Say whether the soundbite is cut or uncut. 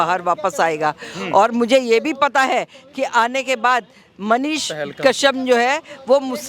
uncut